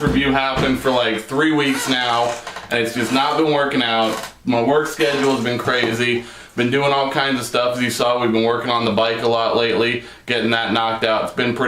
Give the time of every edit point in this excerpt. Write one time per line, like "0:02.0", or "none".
0:07.9